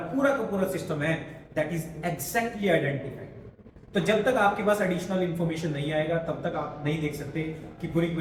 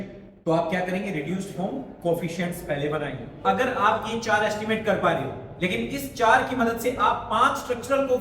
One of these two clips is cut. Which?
second; 1 cut; at 3.4 s

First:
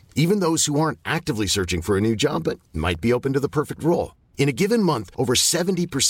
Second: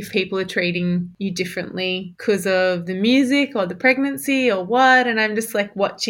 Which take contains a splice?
second; 2 cuts; at 1.1 s, 2.1 s

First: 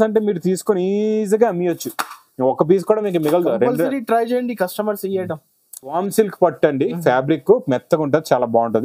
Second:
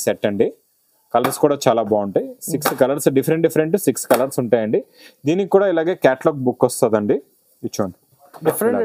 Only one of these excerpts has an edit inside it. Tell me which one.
first; 1 cut; at 5.9 s

